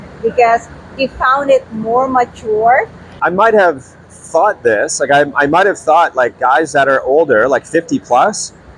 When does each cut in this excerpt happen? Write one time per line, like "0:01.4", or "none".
0:03.0